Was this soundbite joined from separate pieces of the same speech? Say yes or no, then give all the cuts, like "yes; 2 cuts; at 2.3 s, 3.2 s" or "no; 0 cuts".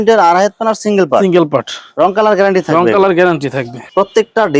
no; 0 cuts